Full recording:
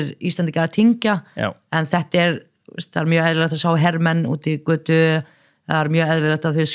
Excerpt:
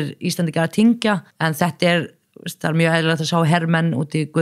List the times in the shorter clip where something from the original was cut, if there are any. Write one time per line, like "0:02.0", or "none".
0:01.3